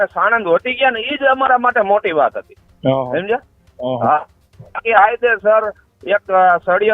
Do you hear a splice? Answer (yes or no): no